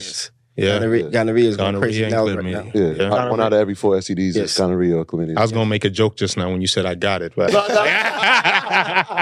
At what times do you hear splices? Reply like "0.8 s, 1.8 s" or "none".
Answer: none